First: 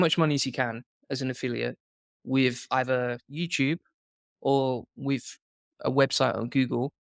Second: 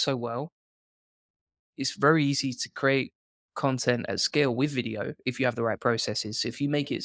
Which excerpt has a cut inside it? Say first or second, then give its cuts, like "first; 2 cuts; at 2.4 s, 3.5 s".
second; 1 cut; at 1.7 s